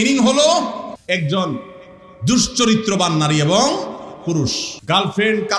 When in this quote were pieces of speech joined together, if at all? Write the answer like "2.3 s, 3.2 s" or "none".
0.9 s, 4.7 s